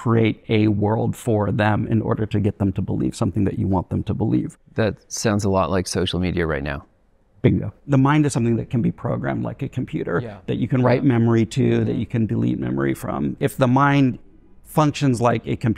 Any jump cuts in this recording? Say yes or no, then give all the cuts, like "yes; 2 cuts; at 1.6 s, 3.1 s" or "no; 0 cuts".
yes; 2 cuts; at 7.8 s, 13.4 s